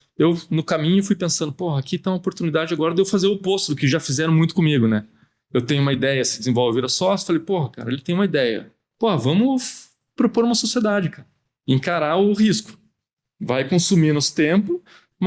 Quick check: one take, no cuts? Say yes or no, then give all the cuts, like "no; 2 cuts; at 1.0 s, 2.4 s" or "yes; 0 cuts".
no; 1 cut; at 8.9 s